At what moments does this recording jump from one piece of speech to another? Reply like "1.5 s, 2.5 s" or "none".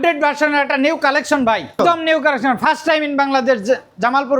1.7 s